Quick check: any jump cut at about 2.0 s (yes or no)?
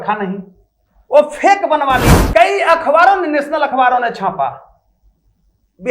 yes